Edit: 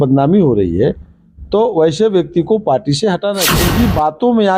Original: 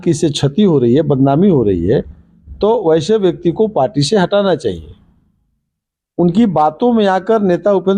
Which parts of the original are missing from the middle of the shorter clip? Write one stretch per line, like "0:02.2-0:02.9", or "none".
0:04.6-0:06.1